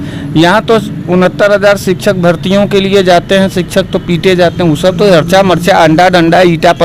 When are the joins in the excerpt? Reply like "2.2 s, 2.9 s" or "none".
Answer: none